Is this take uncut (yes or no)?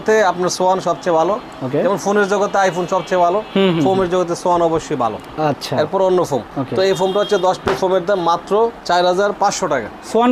yes